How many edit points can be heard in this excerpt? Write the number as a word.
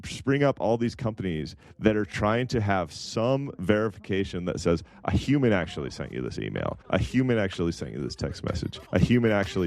three